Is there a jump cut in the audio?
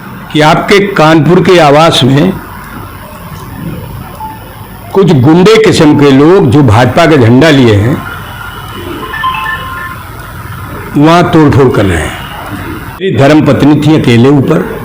yes; 1 cut; at 13.1 s

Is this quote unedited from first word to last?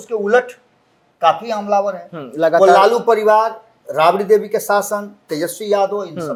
yes; 0 cuts

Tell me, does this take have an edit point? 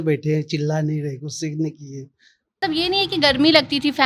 yes; 1 cut; at 2.6 s

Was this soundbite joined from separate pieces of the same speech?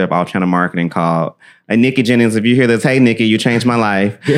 no; 0 cuts

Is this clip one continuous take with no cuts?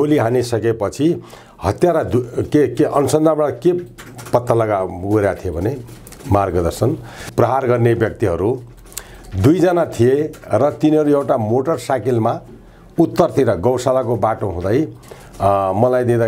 no; 1 cut; at 7.2 s

